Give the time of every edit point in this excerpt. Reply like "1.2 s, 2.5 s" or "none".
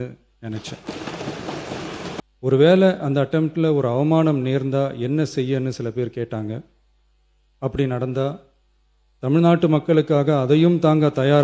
2.2 s

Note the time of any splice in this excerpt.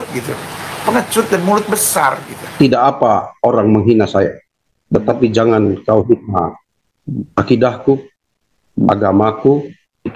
2.4 s

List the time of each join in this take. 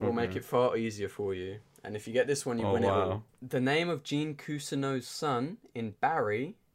3.3 s

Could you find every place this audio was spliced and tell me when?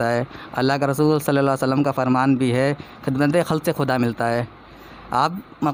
none

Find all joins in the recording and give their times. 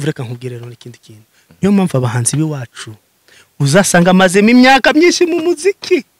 none

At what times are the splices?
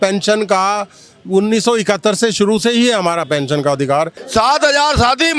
4.2 s

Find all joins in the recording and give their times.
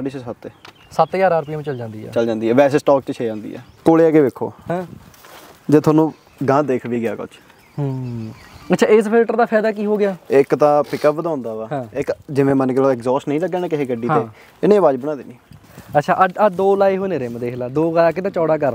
3.7 s, 15.5 s

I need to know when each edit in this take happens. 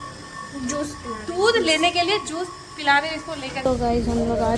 3.7 s

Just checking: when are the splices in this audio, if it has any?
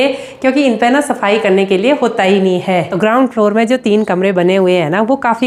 2.9 s

